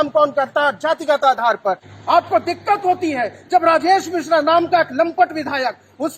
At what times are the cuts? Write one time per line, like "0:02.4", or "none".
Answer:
0:01.9

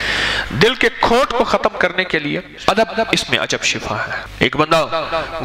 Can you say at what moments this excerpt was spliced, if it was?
0:02.6
0:04.2

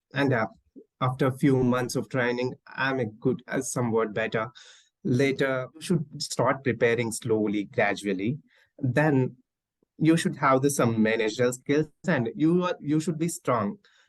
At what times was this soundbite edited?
0:05.8

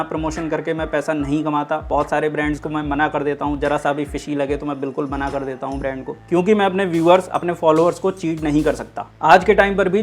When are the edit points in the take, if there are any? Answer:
0:09.1

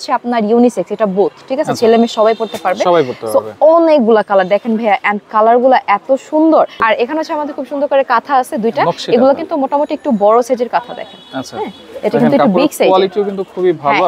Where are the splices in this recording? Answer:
0:06.8

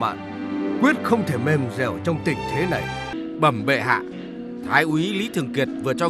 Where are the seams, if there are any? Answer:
0:03.1

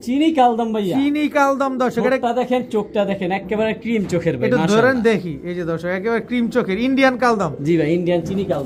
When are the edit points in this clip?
none

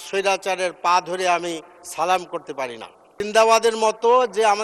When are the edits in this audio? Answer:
0:03.0

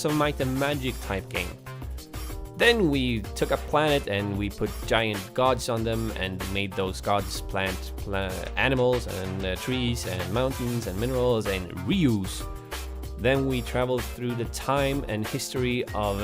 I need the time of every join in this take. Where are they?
0:08.0

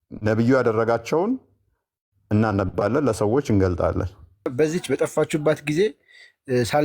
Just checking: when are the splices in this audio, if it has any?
0:04.5

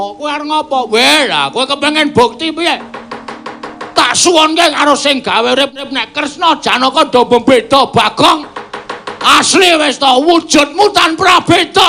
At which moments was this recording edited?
none

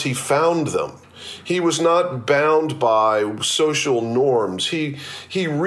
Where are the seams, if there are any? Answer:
none

